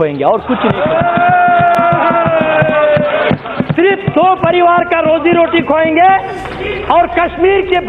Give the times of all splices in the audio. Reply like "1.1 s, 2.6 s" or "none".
none